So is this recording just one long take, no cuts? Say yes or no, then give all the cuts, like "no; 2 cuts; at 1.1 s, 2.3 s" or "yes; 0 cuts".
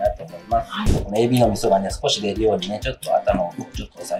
no; 1 cut; at 1.0 s